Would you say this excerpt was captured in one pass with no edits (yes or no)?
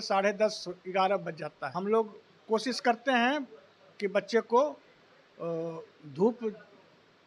no